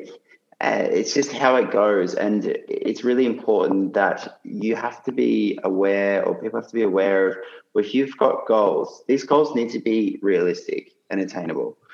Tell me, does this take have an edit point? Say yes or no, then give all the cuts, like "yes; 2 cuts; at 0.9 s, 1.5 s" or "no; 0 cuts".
no; 0 cuts